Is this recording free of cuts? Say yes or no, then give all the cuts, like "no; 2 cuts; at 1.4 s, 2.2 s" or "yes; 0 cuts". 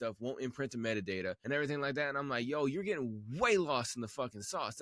no; 1 cut; at 1.4 s